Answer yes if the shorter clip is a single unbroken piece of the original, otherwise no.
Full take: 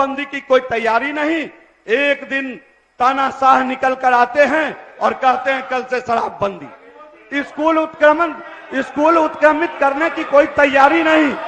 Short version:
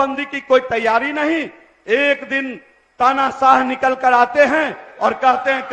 yes